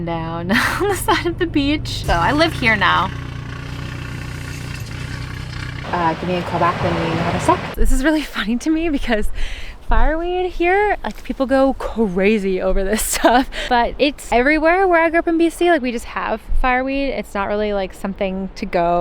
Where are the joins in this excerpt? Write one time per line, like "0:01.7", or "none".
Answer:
0:01.9
0:05.8
0:07.8
0:13.9